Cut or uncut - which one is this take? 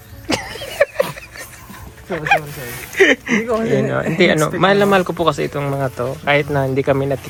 uncut